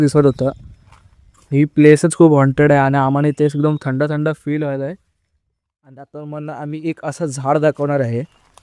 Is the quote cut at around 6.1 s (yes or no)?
yes